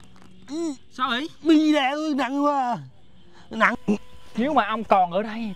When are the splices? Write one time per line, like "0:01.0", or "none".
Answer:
0:03.7

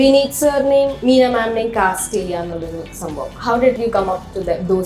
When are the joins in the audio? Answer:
0:01.0
0:03.8

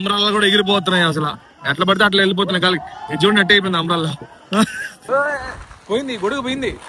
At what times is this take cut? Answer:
0:04.9

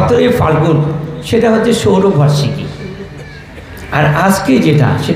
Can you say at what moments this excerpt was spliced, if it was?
none

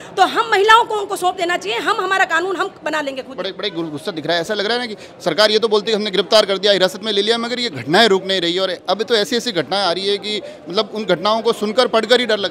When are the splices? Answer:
none

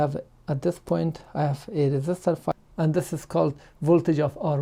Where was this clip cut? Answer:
0:02.6

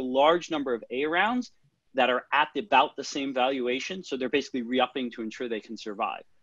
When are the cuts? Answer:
none

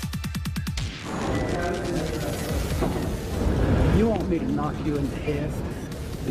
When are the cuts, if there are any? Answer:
0:01.6

